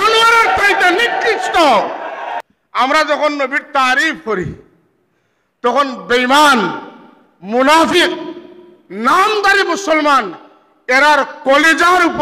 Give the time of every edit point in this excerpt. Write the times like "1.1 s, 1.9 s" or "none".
2.5 s